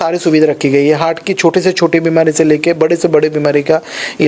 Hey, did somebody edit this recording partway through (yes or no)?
no